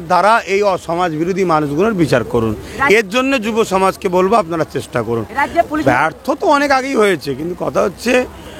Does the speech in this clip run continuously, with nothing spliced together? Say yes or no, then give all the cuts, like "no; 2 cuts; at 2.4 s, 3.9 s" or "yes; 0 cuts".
no; 1 cut; at 5.8 s